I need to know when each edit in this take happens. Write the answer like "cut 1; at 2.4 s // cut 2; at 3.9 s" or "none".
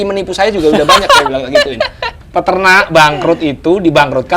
cut 1; at 2.1 s